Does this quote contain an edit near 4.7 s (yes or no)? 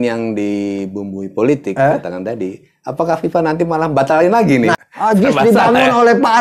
yes